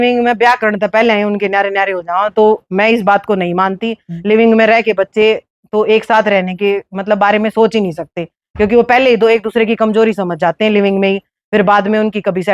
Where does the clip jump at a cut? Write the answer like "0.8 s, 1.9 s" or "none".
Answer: none